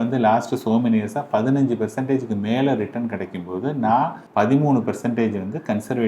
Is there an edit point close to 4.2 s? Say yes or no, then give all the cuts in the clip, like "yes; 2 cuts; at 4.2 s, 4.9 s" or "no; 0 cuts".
yes; 1 cut; at 4.2 s